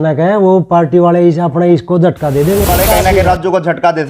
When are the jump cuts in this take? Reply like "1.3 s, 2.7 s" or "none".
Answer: 2.7 s